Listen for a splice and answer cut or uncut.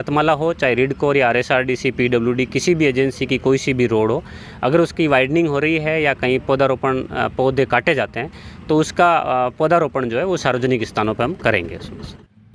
uncut